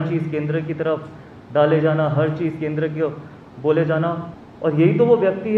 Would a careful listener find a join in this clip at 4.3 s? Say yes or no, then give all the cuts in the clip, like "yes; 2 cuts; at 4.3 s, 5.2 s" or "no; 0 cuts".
yes; 1 cut; at 4.3 s